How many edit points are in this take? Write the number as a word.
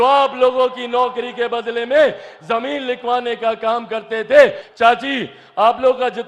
one